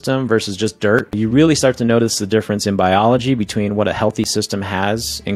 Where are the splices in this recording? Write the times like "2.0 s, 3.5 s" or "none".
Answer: 1.1 s